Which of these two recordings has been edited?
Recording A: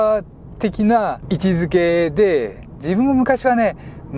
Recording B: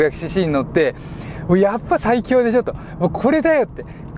A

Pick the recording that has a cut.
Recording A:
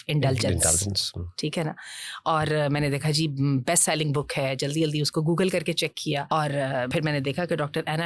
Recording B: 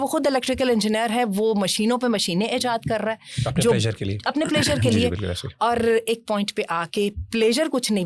A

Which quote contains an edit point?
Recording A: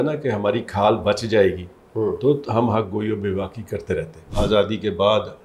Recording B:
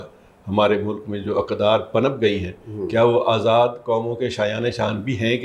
A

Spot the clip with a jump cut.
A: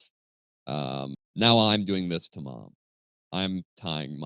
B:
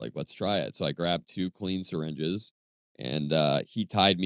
A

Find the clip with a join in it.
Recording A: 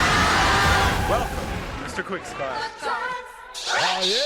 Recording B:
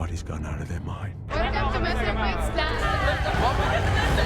B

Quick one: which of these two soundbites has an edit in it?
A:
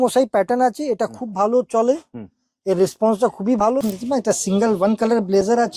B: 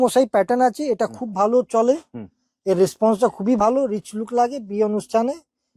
A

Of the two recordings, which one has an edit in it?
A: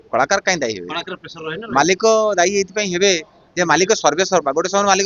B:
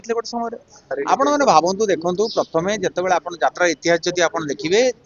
B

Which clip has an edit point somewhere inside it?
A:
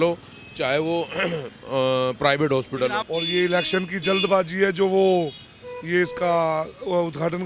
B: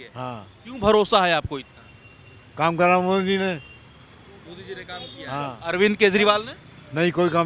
A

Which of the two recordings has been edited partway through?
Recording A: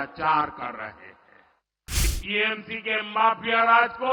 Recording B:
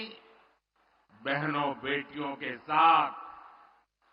A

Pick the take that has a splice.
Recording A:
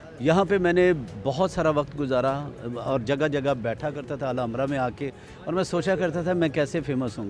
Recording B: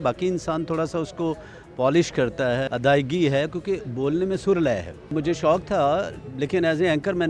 B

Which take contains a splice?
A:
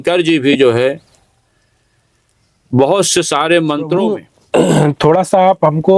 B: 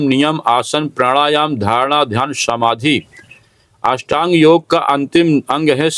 A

